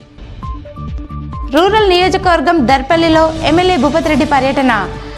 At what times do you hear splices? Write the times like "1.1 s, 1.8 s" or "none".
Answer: 1.0 s